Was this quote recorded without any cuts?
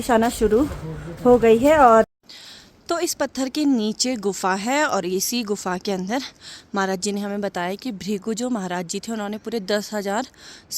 no; 1 cut; at 2.1 s

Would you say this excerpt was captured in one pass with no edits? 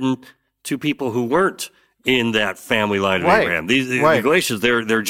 yes; 0 cuts

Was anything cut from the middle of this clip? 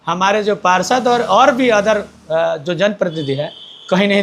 no; 0 cuts

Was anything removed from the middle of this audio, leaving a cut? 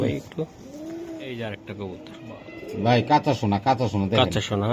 yes; 1 cut; at 1.3 s

